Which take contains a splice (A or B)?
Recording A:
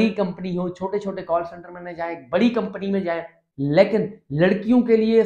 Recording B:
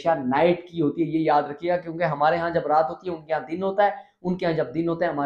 A